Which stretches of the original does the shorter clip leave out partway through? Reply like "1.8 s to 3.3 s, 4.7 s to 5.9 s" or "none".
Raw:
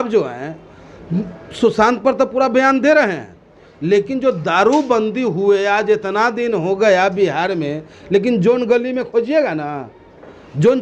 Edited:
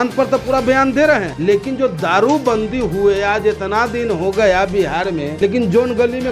3.2 s to 3.7 s, 7.7 s to 8.0 s